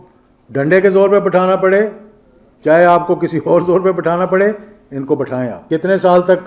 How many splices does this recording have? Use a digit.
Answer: 1